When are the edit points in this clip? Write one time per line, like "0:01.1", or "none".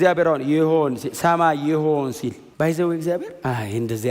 0:02.4